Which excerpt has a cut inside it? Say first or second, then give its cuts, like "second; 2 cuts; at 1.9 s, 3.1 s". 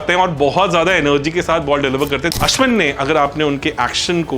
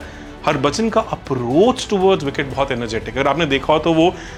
first; 1 cut; at 2.4 s